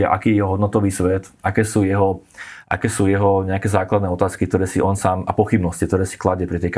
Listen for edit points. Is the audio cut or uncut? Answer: uncut